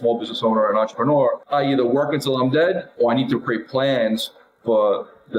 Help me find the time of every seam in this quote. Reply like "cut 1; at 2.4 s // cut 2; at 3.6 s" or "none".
cut 1; at 1.4 s